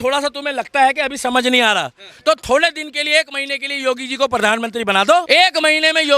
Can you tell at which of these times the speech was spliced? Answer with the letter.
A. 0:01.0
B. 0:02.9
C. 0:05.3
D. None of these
C